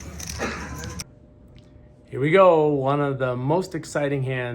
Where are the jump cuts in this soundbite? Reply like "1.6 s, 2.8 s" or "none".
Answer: 1.0 s